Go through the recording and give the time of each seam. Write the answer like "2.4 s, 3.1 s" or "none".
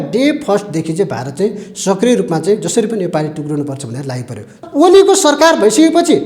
4.5 s